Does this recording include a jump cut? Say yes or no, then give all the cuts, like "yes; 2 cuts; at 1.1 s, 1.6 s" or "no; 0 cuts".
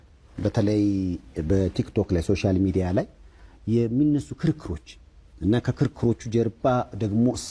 no; 0 cuts